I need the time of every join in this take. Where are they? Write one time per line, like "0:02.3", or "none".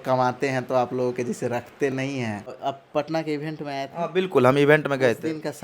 0:02.6